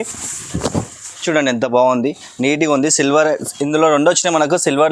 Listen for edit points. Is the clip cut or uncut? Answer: cut